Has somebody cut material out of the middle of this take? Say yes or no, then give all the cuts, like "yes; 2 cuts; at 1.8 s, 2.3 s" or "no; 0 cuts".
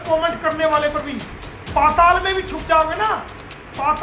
no; 0 cuts